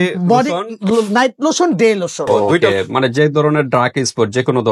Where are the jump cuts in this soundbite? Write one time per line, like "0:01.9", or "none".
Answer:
0:02.6